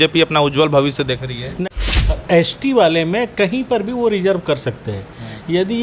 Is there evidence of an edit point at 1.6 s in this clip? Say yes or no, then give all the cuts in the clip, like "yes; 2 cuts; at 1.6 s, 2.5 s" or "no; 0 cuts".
yes; 1 cut; at 1.6 s